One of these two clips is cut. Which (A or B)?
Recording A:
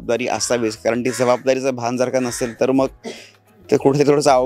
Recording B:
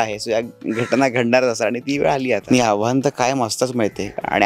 B